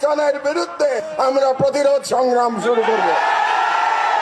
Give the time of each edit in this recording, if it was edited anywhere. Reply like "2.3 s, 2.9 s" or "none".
none